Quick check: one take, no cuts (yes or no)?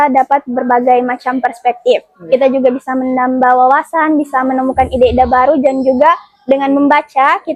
yes